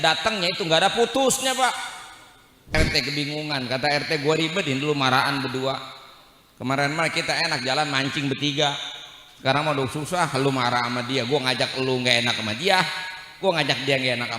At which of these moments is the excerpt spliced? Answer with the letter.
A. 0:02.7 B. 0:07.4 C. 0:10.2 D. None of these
A